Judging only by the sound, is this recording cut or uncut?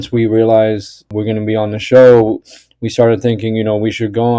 cut